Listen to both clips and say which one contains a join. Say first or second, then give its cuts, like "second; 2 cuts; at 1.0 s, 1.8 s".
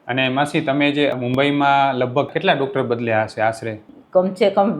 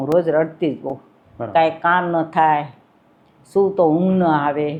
first; 3 cuts; at 1.1 s, 2.3 s, 3.9 s